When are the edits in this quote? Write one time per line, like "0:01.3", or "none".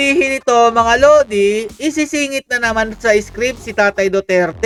none